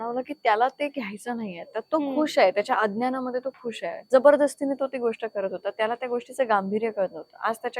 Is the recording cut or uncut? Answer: cut